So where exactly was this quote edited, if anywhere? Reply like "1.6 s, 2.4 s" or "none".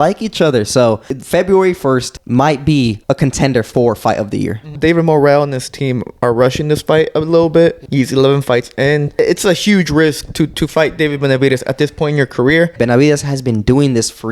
1.1 s, 2.2 s, 3.0 s, 4.7 s, 7.8 s, 9.2 s, 12.7 s